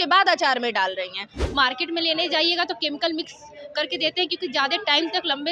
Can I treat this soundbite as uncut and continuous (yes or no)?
no